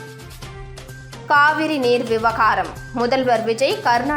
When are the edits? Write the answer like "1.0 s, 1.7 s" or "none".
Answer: 1.0 s